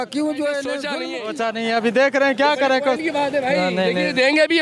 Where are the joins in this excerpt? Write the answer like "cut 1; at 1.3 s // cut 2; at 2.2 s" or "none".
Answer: cut 1; at 0.9 s